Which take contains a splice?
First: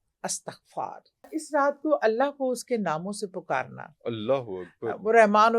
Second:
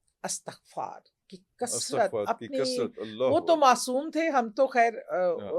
first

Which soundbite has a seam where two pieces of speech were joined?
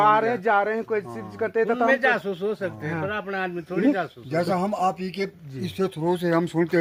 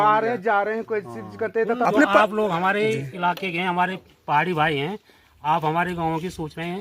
second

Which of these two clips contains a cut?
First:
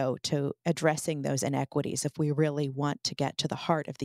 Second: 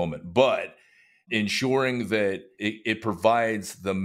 second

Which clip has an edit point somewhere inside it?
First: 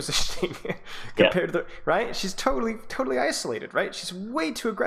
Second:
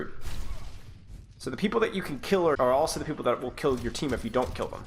second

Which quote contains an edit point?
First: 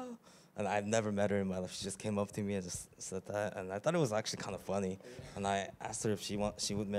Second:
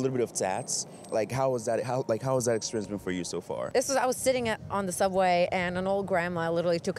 second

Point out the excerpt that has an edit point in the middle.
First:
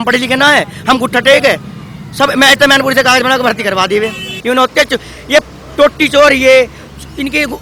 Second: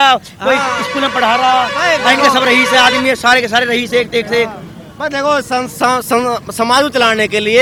first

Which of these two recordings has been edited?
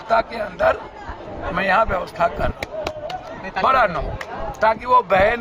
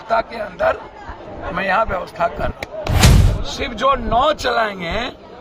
second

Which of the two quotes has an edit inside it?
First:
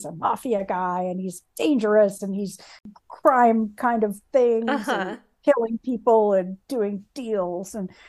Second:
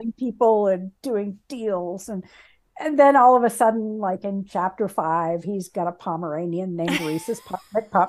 first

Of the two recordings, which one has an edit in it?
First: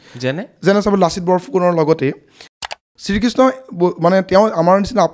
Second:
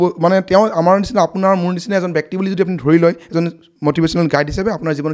first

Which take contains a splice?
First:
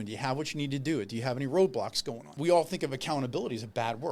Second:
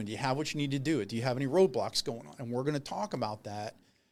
first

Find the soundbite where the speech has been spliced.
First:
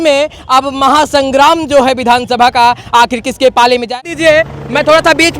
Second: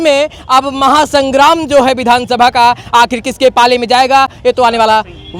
first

